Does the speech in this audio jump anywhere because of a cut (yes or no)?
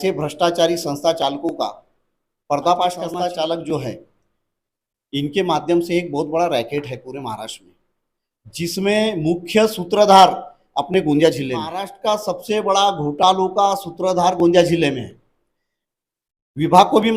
yes